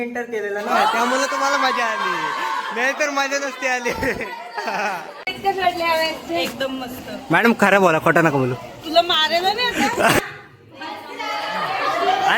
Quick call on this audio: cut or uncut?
cut